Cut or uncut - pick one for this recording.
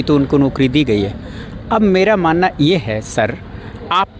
uncut